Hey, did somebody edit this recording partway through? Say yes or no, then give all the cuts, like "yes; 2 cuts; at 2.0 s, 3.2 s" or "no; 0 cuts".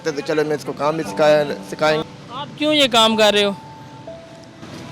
yes; 1 cut; at 2.0 s